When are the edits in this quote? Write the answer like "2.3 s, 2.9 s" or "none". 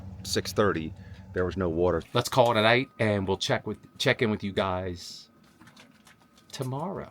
2.0 s

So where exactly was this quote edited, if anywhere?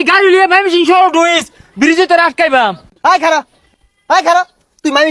2.9 s

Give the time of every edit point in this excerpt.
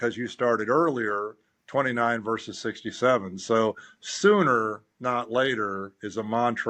none

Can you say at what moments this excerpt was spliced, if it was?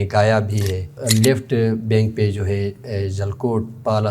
1.0 s

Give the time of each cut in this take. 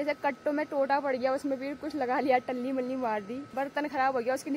3.4 s

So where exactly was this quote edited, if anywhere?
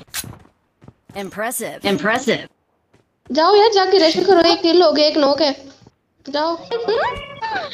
6.6 s

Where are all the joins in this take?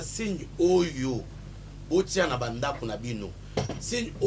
none

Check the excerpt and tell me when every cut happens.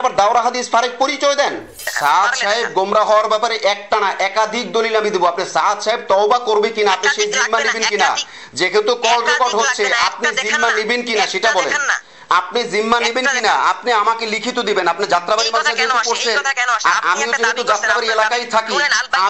1.8 s

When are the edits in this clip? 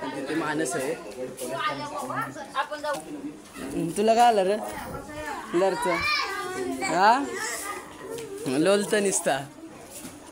3.0 s

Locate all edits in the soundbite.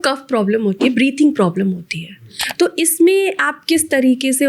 2.4 s

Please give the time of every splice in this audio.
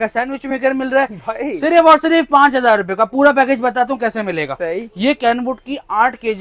none

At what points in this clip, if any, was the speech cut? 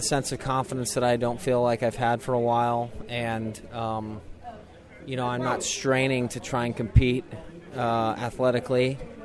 none

